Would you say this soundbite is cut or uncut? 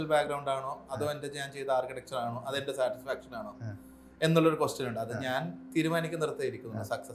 uncut